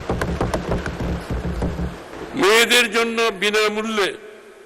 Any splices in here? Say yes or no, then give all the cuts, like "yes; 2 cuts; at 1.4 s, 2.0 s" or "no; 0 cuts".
yes; 1 cut; at 2.1 s